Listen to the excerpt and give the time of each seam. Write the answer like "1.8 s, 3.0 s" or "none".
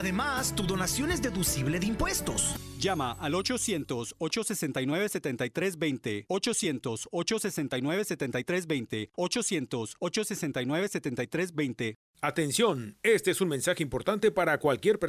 12.0 s